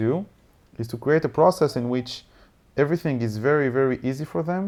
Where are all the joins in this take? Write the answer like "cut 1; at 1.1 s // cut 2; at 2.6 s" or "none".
none